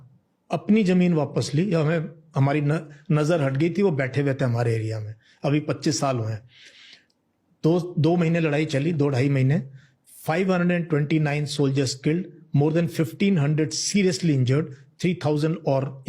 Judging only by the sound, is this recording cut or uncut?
uncut